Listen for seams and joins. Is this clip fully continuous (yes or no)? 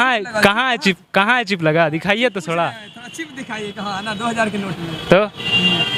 yes